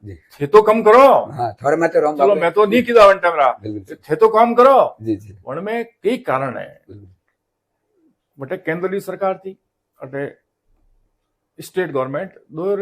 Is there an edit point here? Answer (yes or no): no